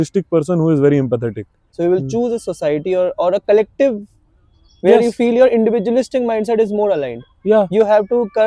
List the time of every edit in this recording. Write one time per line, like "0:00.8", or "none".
0:01.6